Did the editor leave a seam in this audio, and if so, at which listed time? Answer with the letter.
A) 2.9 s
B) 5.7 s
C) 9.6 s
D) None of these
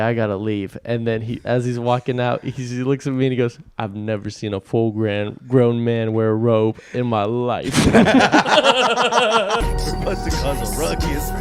C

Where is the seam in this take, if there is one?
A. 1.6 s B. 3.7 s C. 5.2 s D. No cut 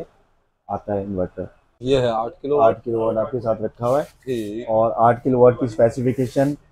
A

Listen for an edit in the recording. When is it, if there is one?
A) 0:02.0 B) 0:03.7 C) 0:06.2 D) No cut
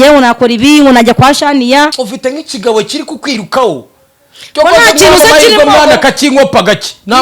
A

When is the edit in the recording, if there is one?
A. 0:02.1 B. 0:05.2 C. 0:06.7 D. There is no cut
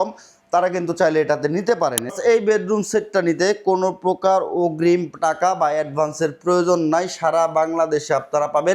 A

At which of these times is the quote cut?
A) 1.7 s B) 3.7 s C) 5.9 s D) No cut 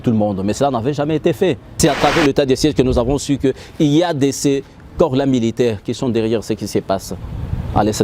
A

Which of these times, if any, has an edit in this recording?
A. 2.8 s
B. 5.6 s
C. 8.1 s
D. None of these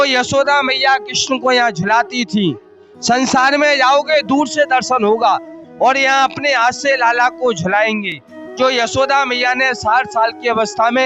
D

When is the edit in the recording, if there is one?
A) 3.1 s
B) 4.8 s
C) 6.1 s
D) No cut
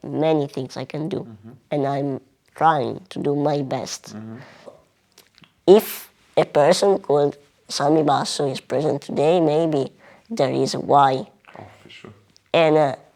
B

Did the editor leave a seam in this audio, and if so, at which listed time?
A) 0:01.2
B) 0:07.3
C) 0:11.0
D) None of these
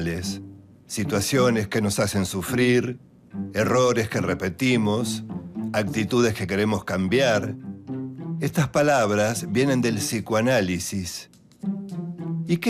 C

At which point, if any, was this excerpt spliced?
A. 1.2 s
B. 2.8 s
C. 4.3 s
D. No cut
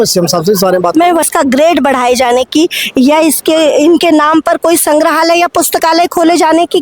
A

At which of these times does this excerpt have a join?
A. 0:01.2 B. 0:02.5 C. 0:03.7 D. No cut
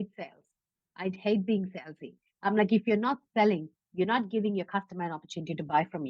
A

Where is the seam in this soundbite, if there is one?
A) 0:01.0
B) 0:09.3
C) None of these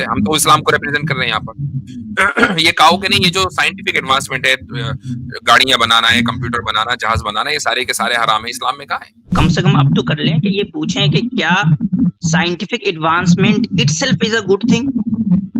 B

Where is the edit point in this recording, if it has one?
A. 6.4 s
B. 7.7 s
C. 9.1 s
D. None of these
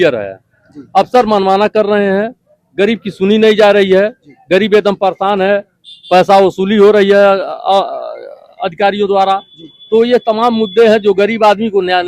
D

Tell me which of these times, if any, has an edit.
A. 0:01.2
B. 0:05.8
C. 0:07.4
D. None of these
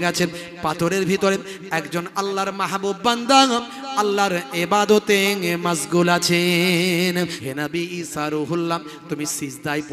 C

